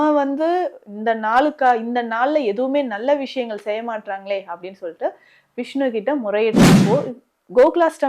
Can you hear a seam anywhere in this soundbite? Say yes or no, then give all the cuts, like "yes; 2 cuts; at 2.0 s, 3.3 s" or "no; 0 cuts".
yes; 1 cut; at 6.8 s